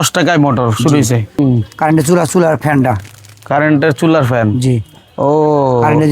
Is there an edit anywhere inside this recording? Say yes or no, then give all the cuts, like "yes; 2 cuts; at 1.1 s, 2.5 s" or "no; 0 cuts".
yes; 1 cut; at 1.4 s